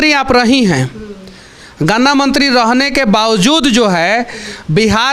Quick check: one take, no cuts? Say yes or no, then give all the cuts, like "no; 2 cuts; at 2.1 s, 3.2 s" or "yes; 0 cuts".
yes; 0 cuts